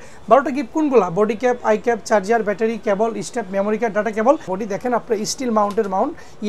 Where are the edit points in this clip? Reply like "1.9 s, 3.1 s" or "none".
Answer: 4.6 s